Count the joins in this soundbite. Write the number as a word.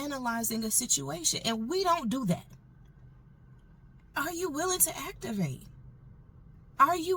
one